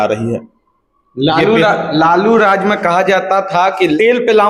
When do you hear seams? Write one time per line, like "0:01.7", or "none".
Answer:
none